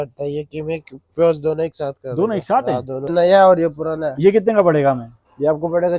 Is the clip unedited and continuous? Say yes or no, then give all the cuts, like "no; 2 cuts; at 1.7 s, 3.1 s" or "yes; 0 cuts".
no; 1 cut; at 3.1 s